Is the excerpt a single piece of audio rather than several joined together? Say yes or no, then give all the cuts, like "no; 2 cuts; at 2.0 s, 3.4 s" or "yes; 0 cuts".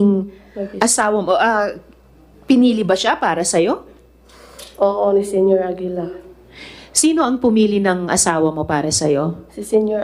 yes; 0 cuts